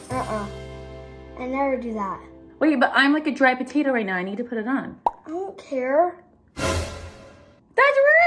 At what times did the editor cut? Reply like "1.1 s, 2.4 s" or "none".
none